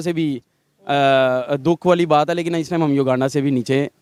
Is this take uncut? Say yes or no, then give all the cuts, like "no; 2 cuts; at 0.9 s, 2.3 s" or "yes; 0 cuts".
yes; 0 cuts